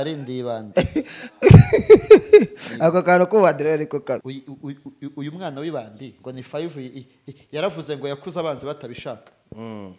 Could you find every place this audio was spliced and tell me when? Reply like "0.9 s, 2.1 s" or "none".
4.3 s